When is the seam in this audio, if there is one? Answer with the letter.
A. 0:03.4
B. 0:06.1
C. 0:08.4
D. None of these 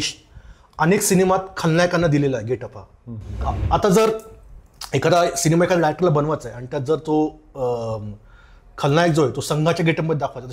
A